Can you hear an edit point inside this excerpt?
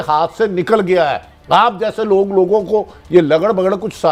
no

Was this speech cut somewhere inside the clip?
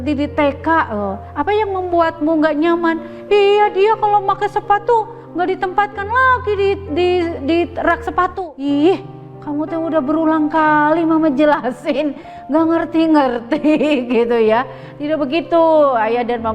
yes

